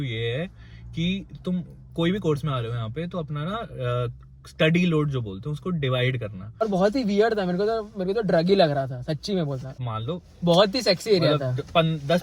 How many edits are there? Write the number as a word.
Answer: two